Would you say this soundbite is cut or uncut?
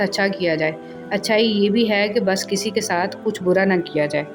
uncut